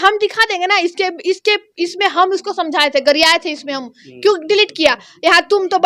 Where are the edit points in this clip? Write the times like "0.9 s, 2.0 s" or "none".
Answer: none

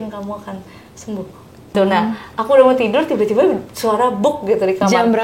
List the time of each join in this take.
1.7 s

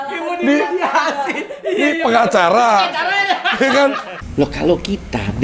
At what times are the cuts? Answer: 4.1 s

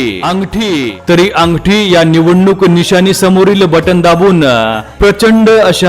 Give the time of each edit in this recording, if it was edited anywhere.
0.9 s

